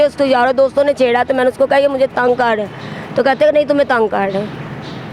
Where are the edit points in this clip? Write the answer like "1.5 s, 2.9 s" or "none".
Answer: none

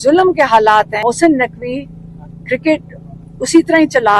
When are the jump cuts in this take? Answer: none

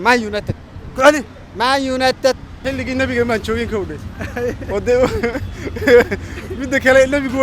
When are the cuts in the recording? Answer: 2.5 s

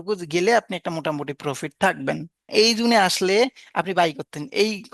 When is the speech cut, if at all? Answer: 2.4 s

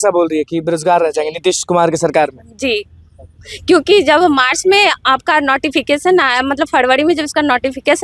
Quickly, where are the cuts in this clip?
none

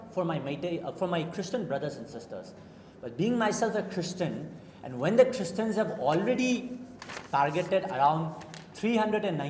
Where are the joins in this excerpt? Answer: none

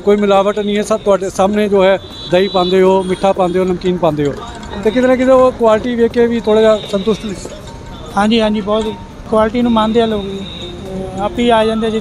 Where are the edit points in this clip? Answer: 9.2 s

